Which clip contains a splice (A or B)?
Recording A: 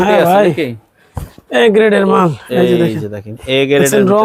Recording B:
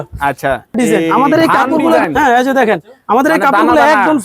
B